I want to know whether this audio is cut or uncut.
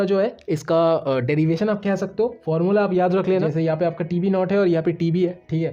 cut